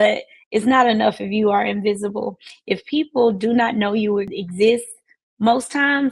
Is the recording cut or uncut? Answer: uncut